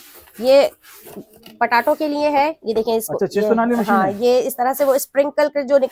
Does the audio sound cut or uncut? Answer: uncut